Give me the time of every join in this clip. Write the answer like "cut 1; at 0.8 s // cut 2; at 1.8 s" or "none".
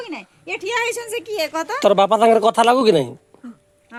none